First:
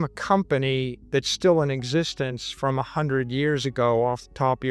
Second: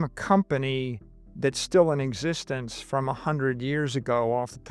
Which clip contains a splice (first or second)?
first